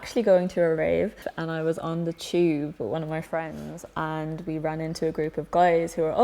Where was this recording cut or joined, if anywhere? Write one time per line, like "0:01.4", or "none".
none